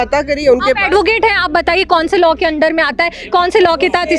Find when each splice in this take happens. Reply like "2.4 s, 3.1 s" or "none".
none